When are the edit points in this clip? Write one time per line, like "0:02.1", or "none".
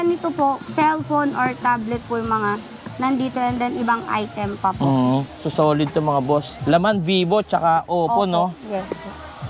0:05.4
0:06.5